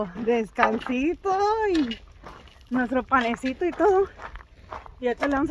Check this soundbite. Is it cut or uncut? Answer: uncut